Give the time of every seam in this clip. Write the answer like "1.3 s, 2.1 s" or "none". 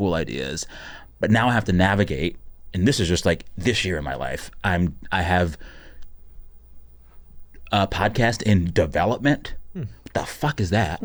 none

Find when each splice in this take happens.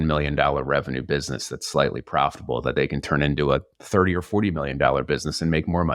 none

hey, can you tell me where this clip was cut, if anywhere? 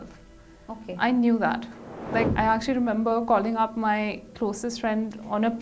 2.3 s

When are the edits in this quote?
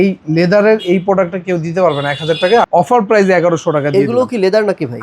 2.7 s

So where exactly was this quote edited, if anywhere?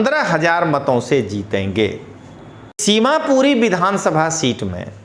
2.7 s

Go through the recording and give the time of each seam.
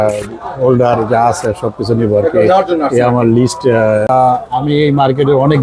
4.1 s

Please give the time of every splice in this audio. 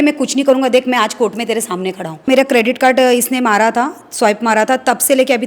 2.3 s

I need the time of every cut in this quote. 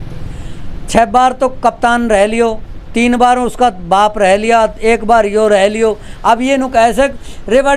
none

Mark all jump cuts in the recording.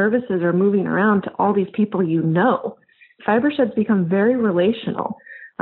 3.1 s

